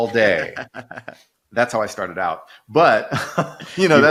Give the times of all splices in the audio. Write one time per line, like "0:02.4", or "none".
none